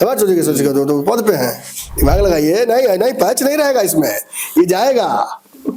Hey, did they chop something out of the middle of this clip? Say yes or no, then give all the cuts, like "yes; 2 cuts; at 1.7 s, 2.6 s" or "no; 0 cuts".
no; 0 cuts